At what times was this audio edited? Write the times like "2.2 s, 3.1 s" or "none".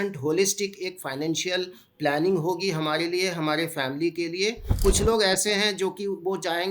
4.7 s